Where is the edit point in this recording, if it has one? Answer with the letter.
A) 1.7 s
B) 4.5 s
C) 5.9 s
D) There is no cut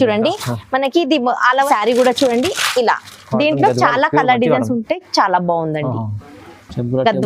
A